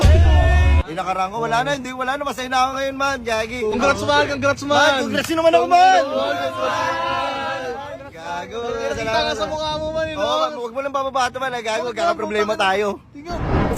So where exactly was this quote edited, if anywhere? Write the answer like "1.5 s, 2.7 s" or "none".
0.8 s, 3.7 s